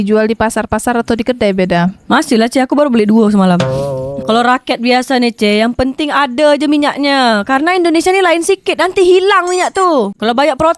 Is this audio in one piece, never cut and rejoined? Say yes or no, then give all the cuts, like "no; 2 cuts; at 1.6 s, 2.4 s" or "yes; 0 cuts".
no; 1 cut; at 4.2 s